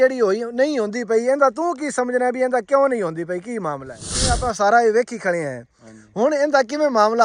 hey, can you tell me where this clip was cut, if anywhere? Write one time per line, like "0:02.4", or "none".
0:04.3